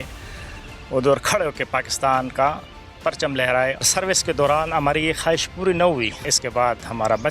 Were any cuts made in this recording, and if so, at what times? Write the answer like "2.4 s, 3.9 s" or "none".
3.8 s, 6.4 s